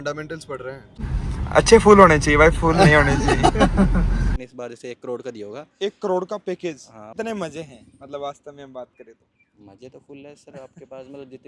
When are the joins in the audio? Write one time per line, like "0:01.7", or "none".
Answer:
0:01.0
0:04.4
0:07.1